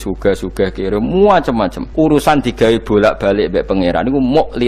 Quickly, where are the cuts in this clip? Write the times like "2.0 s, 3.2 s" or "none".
1.8 s